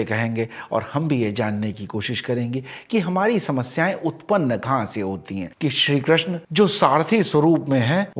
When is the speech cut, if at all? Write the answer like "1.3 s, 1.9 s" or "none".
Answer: 5.5 s